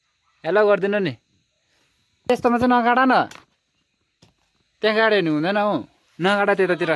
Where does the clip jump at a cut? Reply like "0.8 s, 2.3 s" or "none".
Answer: 2.3 s